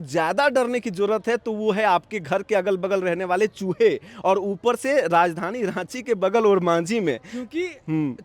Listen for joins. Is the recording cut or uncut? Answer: uncut